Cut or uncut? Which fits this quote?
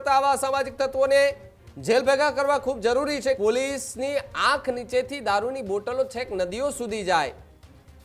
cut